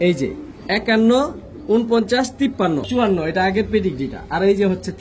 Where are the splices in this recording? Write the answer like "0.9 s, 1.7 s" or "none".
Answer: 2.9 s